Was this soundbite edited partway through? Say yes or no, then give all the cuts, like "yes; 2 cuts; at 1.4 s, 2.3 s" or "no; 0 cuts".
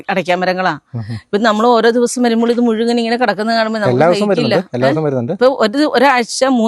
yes; 1 cut; at 5.4 s